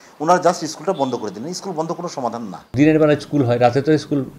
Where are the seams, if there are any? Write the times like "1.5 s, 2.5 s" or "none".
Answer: 2.7 s